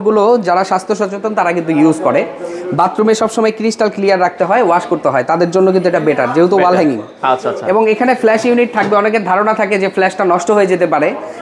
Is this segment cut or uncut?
uncut